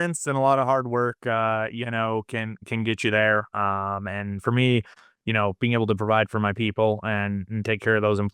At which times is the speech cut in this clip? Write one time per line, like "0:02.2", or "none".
none